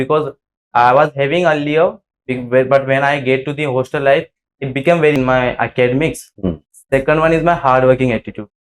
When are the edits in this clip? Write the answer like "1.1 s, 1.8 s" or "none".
5.2 s